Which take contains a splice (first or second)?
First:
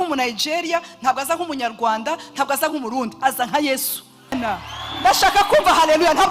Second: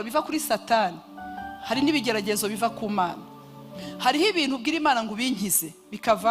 first